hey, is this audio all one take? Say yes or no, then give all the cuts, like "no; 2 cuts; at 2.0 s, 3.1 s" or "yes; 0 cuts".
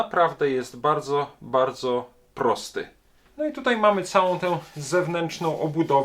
no; 1 cut; at 3.2 s